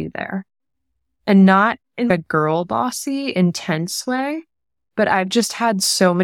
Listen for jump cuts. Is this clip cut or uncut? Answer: uncut